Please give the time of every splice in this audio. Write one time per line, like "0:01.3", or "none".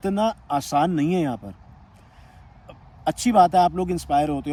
none